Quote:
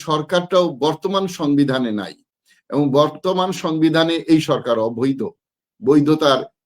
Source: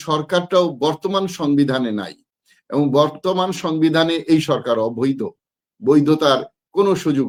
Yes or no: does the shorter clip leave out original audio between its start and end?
no